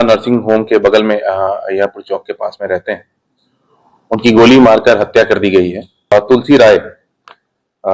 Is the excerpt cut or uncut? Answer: cut